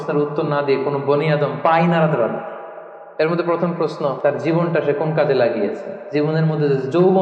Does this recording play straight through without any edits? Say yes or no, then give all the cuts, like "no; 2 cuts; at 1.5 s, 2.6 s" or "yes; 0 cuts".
no; 3 cuts; at 3.0 s, 4.3 s, 6.0 s